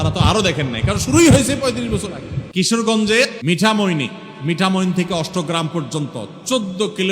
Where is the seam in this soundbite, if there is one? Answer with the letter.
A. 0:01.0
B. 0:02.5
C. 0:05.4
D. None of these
B